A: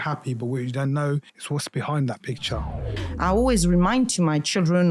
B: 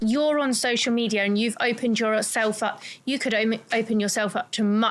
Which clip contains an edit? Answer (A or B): A